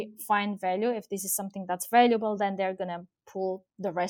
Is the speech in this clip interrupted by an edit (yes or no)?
no